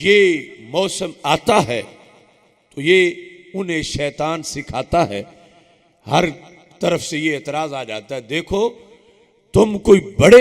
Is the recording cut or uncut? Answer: uncut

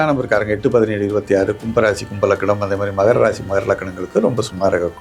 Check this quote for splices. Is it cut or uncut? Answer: uncut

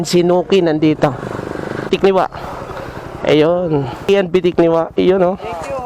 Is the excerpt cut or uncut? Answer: cut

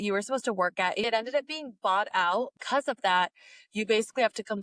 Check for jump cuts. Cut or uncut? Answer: cut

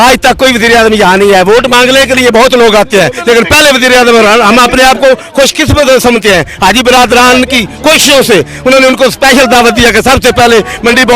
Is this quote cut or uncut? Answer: uncut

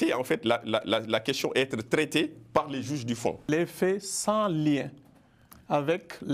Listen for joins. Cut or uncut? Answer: cut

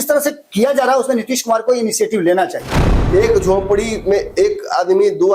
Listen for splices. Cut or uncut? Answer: cut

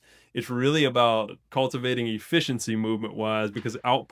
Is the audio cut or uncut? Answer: cut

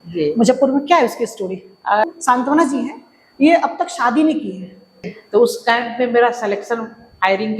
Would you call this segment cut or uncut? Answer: cut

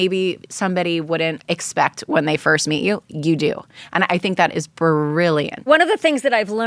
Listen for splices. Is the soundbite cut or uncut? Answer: cut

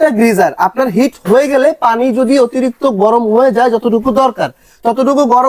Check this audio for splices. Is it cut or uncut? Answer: uncut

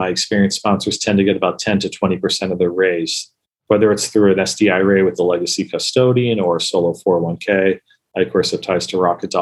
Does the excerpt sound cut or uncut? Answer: uncut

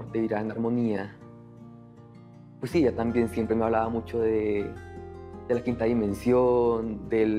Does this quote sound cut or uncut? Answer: uncut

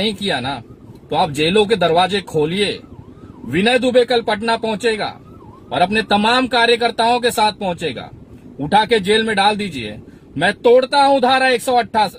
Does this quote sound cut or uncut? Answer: uncut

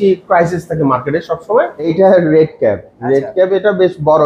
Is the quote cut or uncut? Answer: cut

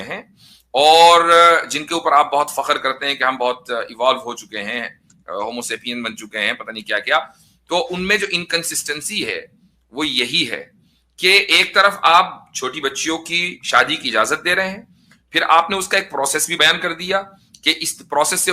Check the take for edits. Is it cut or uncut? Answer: cut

